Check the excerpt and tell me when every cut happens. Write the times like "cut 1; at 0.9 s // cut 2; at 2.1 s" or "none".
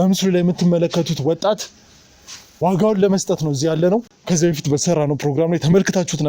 cut 1; at 4.1 s